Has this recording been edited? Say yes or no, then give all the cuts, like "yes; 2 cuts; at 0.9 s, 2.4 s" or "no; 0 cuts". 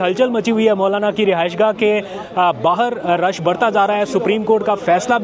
no; 0 cuts